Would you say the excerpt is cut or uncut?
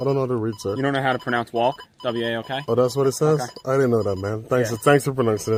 uncut